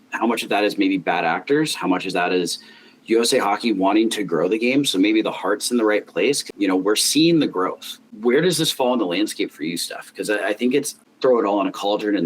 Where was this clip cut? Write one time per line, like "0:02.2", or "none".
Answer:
0:06.5
0:08.0
0:11.0